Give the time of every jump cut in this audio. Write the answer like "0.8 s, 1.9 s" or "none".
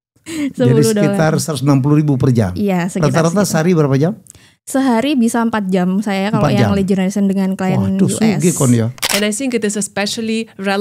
9.1 s